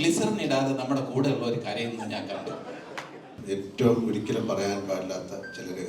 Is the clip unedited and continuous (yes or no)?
no